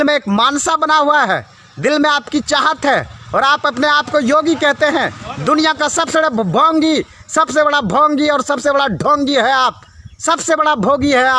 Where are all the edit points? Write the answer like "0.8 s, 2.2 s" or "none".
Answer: none